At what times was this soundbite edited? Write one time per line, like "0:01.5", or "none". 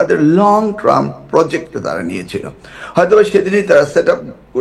none